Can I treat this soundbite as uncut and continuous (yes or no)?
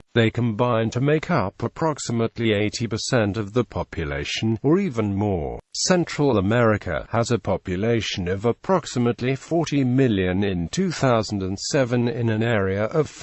yes